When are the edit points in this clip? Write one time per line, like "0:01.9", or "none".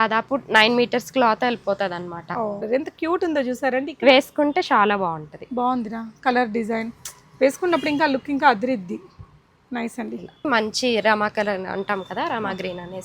0:02.6
0:10.5

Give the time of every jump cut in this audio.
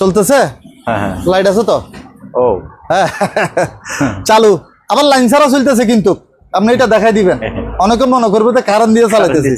none

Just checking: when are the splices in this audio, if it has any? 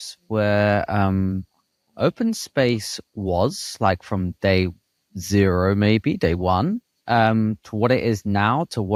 none

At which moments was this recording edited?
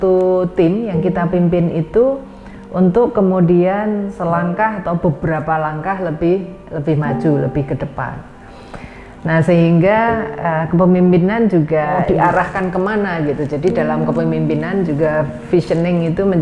0:12.0

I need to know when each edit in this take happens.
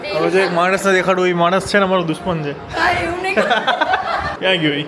none

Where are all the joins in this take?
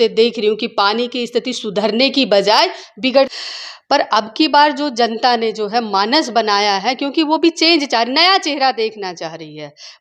0:03.4

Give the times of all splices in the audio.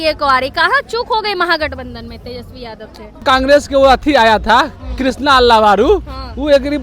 0:03.2

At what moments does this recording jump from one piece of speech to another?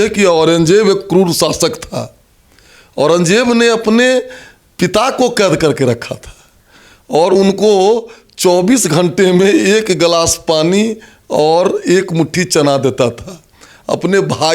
none

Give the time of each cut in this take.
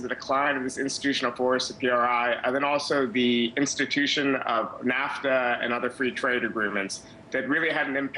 none

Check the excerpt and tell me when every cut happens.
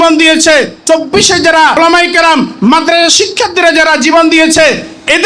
0:01.8

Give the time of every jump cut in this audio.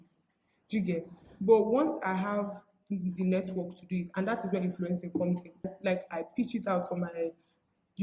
0:05.7

